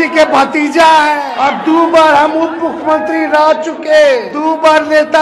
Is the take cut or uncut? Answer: cut